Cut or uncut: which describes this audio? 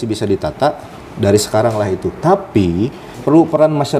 cut